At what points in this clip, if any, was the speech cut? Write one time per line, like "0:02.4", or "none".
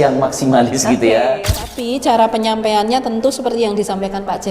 0:01.6